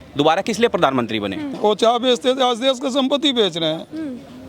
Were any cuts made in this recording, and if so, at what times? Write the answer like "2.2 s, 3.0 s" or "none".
1.6 s